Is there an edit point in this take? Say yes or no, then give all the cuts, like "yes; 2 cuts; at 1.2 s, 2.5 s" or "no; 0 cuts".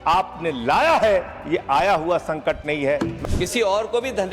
yes; 1 cut; at 3.2 s